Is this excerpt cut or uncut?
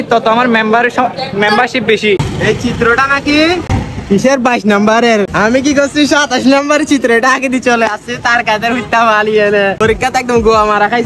cut